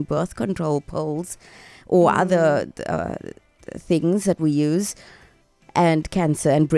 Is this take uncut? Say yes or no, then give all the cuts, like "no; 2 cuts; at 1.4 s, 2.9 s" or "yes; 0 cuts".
yes; 0 cuts